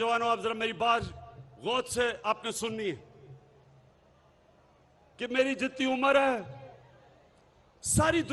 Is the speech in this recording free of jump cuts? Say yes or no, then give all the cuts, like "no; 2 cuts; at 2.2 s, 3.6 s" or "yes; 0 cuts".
yes; 0 cuts